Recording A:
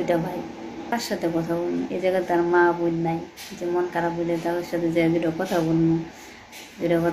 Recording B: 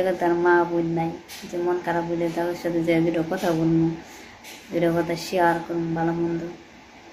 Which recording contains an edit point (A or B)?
A